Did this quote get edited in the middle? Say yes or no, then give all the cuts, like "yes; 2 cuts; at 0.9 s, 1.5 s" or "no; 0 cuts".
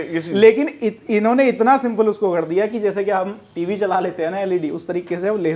no; 0 cuts